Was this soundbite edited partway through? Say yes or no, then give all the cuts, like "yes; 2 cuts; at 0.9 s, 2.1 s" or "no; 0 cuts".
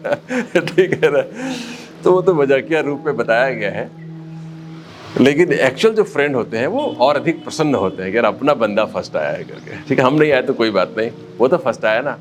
no; 0 cuts